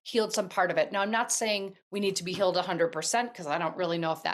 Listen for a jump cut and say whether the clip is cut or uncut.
uncut